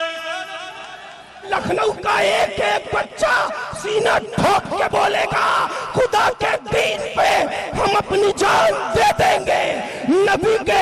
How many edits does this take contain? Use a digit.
1